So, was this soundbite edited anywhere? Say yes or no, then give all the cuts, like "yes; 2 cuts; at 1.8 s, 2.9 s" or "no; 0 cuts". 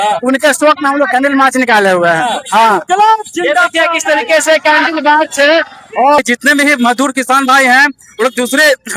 yes; 1 cut; at 6.2 s